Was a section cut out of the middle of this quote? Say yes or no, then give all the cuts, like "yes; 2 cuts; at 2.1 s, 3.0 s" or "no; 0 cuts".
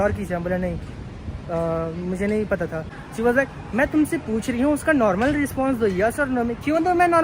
yes; 1 cut; at 2.9 s